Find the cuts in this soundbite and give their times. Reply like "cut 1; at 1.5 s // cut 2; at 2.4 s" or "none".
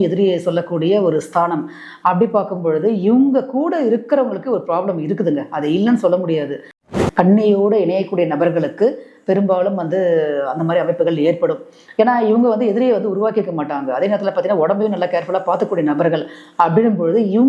cut 1; at 6.8 s